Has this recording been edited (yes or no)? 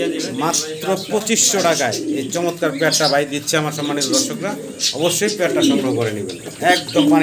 no